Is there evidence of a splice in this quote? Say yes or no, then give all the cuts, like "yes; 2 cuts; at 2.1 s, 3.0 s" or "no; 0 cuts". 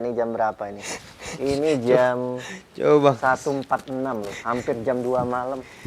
no; 0 cuts